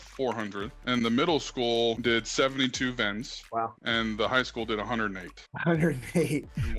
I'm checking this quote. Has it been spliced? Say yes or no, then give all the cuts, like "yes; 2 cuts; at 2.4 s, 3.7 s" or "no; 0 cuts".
yes; 1 cut; at 2.0 s